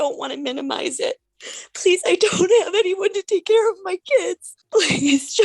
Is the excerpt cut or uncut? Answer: cut